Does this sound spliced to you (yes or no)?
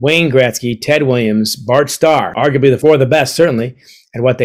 yes